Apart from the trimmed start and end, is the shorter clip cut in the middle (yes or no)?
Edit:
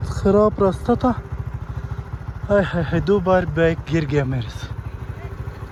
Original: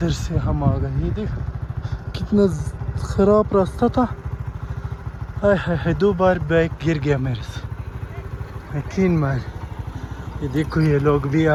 no